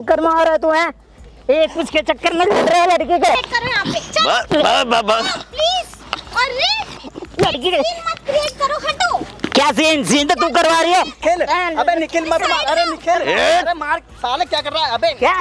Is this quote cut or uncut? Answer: cut